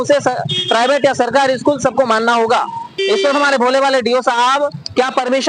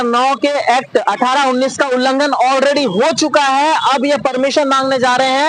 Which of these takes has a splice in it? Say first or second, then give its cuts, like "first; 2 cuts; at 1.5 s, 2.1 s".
first; 1 cut; at 3.0 s